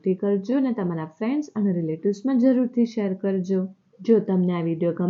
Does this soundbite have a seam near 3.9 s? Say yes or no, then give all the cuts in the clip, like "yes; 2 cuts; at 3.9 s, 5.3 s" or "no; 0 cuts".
yes; 1 cut; at 3.9 s